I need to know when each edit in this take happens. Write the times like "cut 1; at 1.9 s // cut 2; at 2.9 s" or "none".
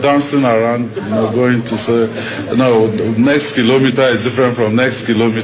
none